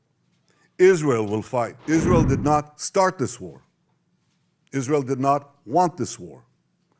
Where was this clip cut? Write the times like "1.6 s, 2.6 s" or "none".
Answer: 1.8 s